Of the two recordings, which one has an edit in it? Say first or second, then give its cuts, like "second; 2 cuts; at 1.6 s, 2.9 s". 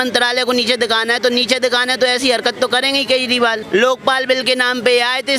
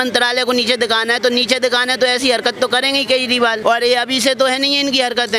first; 1 cut; at 3.6 s